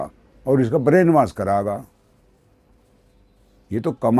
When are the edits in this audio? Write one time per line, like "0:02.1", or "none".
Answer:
none